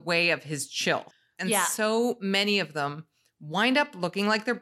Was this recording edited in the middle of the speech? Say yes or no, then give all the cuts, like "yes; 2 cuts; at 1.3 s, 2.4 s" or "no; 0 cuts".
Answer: yes; 1 cut; at 1.2 s